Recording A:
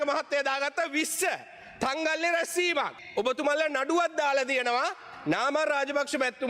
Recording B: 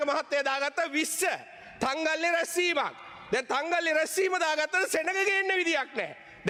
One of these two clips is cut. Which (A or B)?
A